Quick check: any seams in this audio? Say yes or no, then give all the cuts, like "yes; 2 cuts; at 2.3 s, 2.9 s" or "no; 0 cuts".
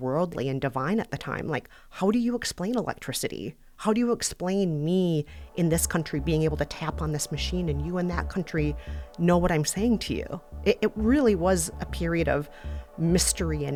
no; 0 cuts